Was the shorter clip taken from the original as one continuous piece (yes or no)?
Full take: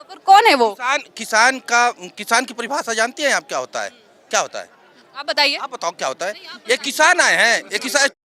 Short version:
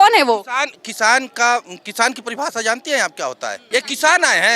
no